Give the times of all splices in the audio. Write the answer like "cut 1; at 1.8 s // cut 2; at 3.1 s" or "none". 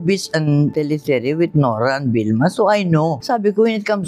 none